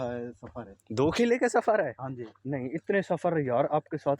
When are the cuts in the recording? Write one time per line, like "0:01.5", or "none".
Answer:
none